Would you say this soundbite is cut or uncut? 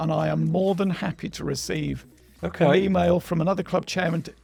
uncut